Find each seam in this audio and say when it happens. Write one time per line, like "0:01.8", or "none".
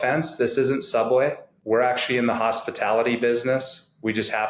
0:01.5